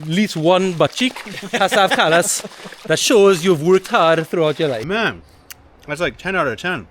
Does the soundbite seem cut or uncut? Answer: cut